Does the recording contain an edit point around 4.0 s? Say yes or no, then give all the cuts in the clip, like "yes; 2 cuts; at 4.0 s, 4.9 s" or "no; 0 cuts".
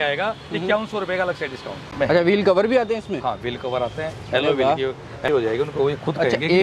no; 2 cuts; at 1.8 s, 5.3 s